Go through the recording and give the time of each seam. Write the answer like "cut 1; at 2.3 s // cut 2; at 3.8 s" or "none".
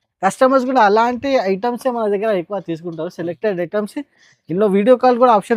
none